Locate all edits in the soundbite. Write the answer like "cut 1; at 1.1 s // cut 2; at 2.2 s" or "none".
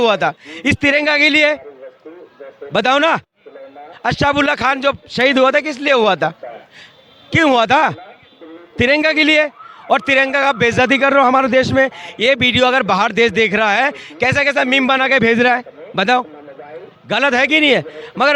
none